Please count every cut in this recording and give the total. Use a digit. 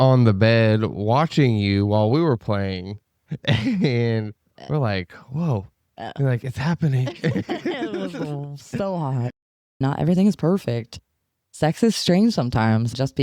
1